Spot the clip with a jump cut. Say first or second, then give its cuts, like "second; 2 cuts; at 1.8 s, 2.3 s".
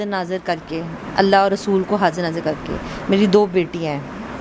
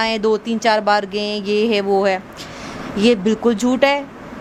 first; 1 cut; at 1.0 s